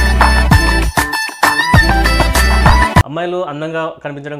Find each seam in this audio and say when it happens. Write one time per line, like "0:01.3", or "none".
0:03.1